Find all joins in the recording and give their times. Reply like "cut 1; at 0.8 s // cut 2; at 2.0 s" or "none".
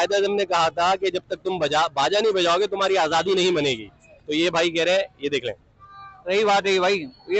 none